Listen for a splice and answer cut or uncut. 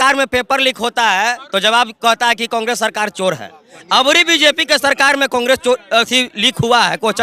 uncut